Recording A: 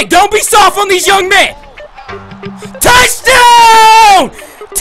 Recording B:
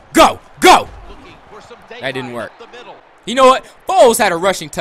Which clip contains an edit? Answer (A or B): B